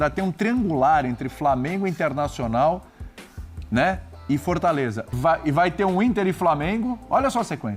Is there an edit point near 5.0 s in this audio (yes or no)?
yes